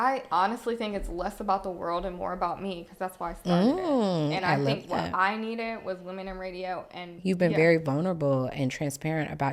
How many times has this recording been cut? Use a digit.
1